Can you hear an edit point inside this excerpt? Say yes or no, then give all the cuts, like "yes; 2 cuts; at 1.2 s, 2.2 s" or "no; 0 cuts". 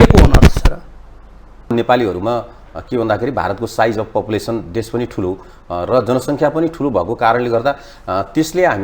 yes; 1 cut; at 1.7 s